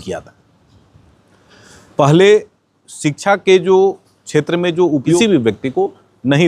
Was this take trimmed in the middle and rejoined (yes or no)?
yes